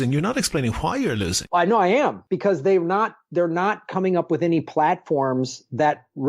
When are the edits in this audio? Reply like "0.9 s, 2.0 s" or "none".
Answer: 1.4 s, 2.2 s